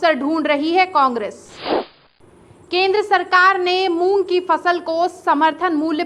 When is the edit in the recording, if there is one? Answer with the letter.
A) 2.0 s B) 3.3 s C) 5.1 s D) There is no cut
A